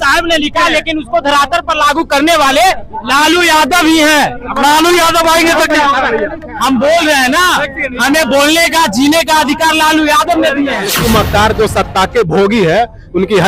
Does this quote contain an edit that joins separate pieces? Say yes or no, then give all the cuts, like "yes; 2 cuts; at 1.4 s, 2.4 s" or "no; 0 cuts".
yes; 1 cut; at 10.9 s